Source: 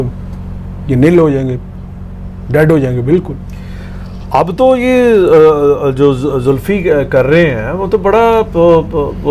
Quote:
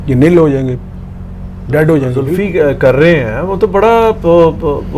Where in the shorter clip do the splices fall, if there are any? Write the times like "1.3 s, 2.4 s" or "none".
2.2 s